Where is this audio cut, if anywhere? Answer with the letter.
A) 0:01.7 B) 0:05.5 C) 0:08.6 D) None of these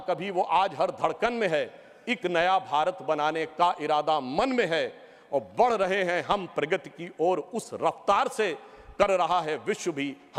D